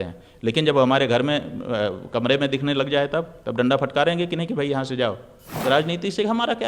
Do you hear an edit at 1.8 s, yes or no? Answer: no